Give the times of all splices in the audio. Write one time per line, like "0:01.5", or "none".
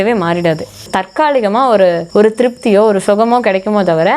0:00.9
0:02.0